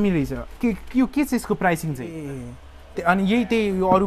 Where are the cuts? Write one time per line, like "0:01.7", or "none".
0:02.2